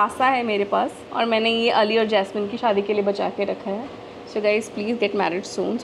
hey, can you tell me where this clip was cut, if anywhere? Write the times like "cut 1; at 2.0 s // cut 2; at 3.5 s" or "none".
cut 1; at 1.0 s // cut 2; at 2.5 s